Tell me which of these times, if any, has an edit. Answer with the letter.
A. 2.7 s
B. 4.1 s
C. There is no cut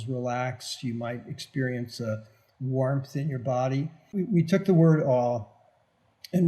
B